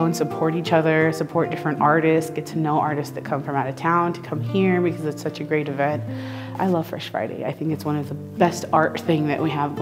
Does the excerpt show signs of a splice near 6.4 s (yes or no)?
yes